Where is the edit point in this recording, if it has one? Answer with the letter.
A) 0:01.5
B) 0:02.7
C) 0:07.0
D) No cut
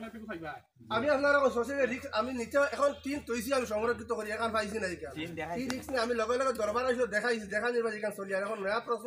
D